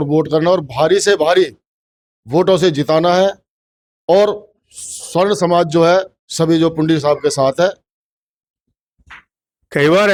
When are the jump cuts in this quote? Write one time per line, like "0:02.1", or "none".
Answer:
none